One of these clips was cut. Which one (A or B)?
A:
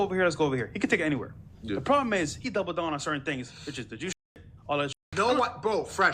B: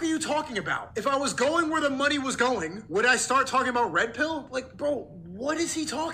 A